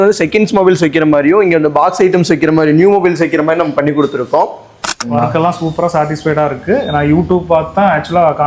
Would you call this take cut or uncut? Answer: cut